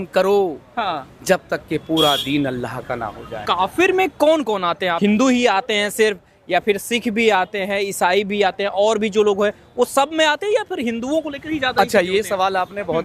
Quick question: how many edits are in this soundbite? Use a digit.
2